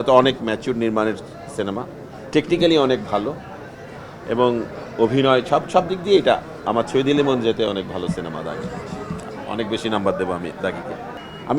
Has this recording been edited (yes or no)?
no